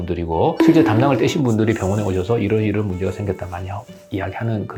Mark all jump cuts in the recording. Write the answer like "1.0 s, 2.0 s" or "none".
none